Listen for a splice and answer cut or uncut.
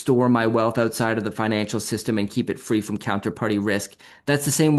uncut